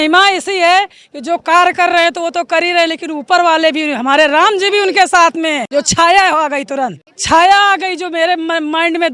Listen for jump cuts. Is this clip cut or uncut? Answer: cut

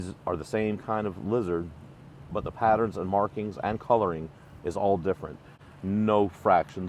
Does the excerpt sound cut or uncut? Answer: cut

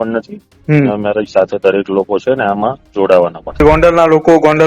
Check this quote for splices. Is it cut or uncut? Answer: cut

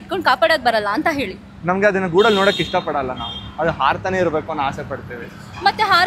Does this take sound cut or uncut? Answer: uncut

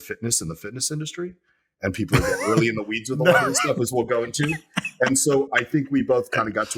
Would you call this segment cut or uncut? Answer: uncut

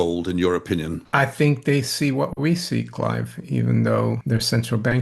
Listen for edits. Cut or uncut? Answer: cut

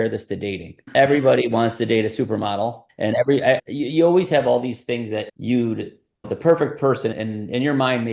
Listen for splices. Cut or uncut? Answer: uncut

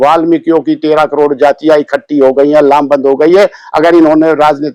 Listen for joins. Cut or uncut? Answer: uncut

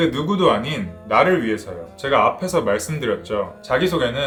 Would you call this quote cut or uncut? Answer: uncut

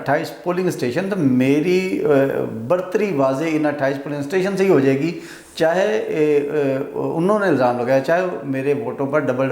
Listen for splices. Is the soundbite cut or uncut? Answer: uncut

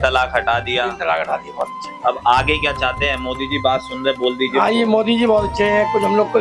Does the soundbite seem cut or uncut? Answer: uncut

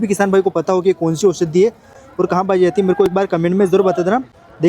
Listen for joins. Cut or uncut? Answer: uncut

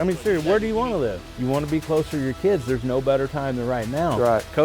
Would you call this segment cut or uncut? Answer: cut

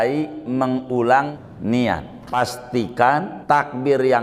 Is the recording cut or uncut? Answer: cut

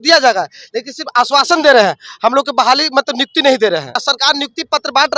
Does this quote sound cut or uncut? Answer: cut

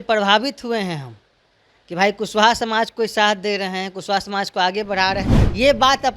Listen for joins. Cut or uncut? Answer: cut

